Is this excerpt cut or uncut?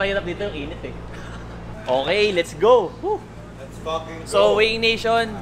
cut